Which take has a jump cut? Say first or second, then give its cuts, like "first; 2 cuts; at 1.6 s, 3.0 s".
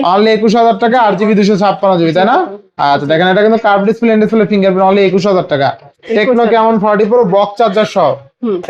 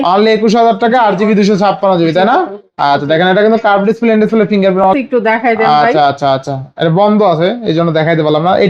second; 1 cut; at 4.9 s